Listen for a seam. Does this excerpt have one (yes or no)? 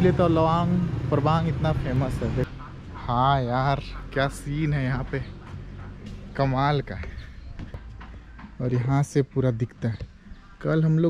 yes